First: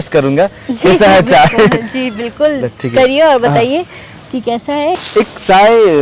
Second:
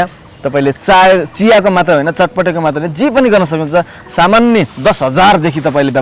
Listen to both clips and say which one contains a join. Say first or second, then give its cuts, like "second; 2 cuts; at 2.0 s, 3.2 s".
first; 1 cut; at 5.0 s